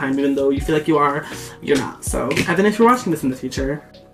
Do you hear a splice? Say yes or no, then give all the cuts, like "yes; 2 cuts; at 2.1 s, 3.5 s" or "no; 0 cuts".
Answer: no; 0 cuts